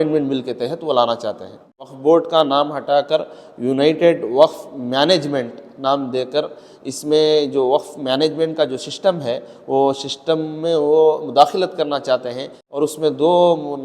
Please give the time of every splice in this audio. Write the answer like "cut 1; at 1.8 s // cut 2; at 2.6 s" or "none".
cut 1; at 1.9 s // cut 2; at 12.6 s